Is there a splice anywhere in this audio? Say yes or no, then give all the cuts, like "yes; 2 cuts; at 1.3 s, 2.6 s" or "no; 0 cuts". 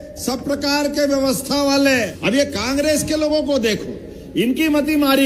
yes; 1 cut; at 2.1 s